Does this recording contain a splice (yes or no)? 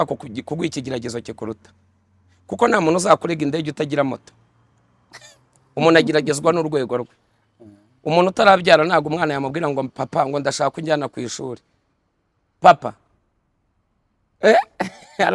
no